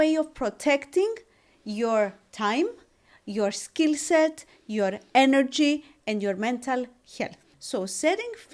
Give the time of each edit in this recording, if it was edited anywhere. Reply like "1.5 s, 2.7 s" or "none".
7.5 s